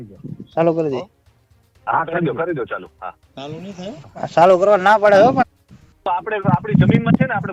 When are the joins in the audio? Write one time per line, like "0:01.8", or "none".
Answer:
none